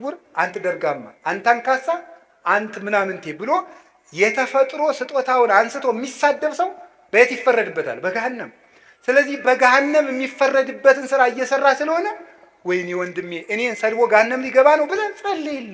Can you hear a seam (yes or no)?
no